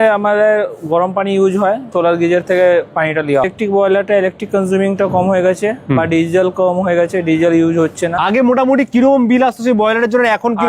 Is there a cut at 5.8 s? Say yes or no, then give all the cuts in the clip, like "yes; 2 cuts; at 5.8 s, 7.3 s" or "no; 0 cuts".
no; 3 cuts; at 1.9 s, 3.5 s, 8.2 s